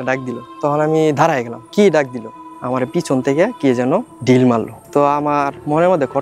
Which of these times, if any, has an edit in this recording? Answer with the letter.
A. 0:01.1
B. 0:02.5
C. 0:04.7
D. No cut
B